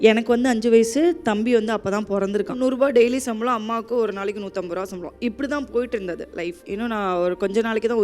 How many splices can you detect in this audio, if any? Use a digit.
2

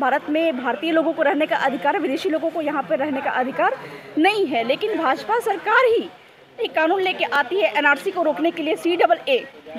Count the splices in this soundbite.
0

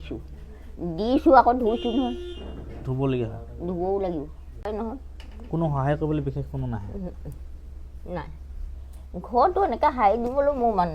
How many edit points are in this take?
1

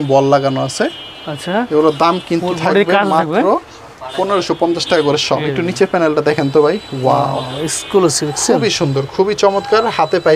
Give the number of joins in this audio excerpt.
0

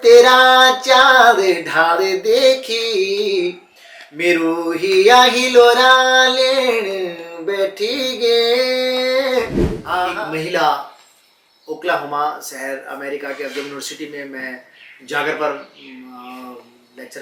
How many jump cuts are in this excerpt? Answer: 1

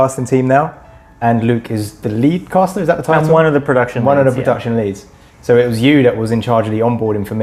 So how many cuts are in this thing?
0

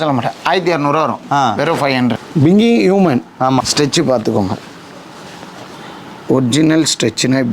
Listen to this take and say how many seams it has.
2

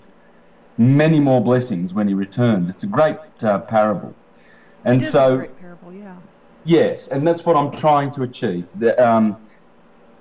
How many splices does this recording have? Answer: 1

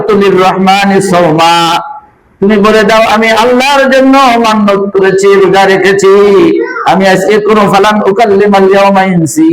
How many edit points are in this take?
0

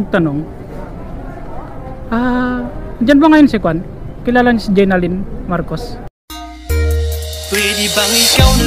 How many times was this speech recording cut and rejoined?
0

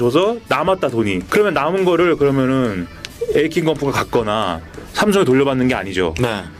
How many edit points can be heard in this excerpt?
1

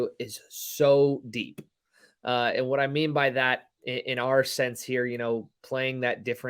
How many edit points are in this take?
0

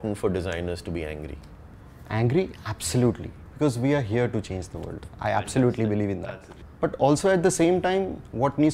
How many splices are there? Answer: 1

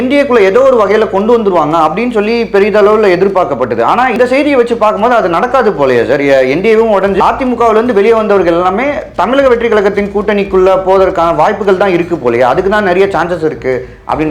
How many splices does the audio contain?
2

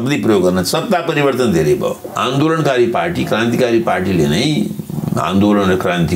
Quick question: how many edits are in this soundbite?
1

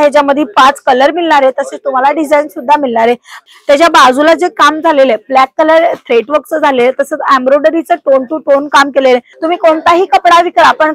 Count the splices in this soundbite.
2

